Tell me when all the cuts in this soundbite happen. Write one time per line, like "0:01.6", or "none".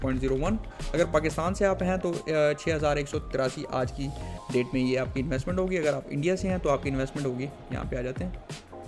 none